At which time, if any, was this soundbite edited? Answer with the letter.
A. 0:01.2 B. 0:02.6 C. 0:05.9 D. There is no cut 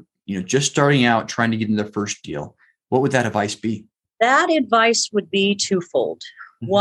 D